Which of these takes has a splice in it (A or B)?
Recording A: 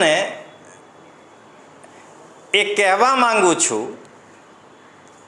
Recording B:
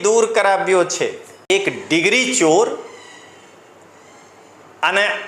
B